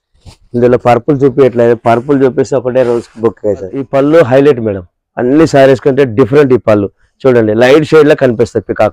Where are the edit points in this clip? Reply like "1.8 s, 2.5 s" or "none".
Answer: 3.9 s

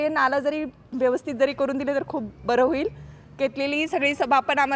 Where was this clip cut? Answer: none

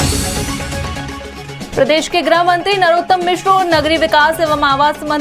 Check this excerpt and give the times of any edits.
0.9 s

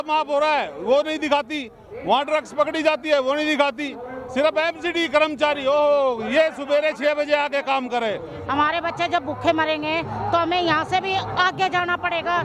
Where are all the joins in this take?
8.3 s

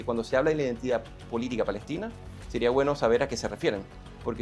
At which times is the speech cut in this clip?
none

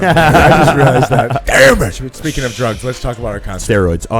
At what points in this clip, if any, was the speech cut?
2.1 s

